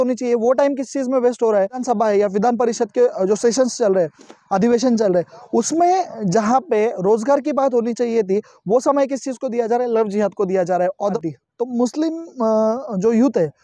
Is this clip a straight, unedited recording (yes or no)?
no